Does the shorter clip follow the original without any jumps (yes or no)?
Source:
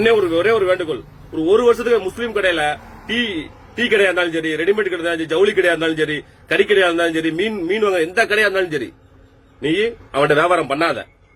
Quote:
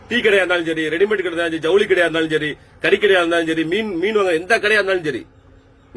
yes